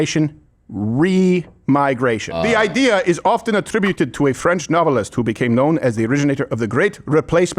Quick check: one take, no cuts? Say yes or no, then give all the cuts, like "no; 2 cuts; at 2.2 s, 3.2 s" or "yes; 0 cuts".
no; 1 cut; at 2.4 s